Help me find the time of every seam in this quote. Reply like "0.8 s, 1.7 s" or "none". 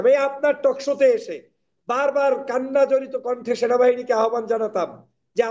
none